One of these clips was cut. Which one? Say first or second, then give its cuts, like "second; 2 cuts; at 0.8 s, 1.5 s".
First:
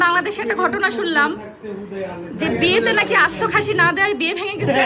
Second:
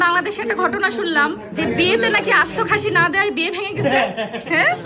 second; 1 cut; at 1.5 s